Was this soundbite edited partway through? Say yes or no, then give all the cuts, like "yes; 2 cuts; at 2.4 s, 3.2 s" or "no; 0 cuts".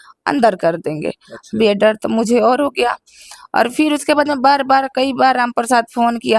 no; 0 cuts